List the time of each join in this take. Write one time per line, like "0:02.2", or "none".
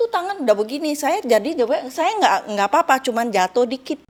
none